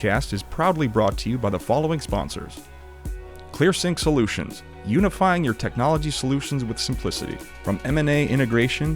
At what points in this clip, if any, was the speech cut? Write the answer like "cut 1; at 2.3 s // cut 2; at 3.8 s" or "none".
cut 1; at 3.2 s